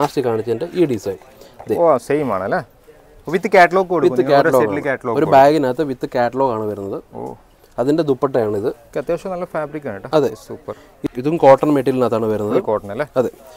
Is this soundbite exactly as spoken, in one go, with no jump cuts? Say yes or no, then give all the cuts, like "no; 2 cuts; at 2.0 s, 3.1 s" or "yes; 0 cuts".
no; 1 cut; at 11.0 s